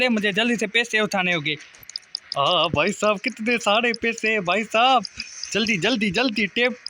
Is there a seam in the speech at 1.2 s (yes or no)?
no